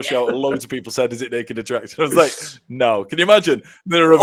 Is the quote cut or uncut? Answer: uncut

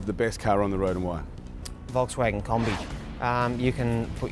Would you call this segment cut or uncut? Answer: uncut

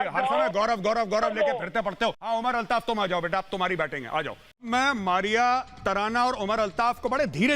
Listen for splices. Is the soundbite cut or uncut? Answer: cut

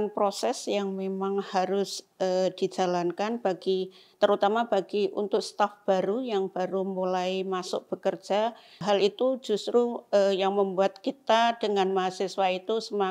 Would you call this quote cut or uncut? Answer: cut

